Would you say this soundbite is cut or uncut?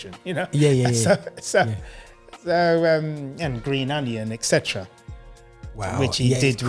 uncut